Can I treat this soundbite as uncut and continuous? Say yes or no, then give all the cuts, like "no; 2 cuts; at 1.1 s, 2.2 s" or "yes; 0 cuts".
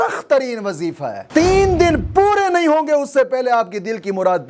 no; 1 cut; at 1.2 s